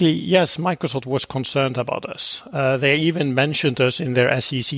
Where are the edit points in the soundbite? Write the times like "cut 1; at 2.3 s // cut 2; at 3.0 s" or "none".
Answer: none